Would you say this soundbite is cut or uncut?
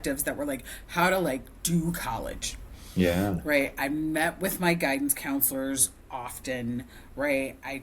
uncut